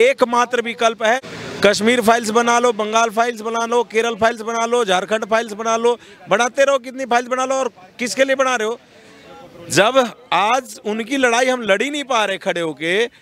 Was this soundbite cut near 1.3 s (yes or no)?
yes